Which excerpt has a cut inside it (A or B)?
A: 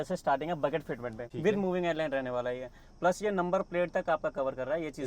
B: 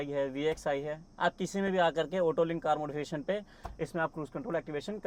A